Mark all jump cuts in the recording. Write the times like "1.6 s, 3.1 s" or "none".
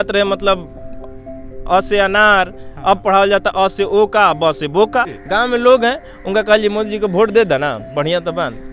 5.2 s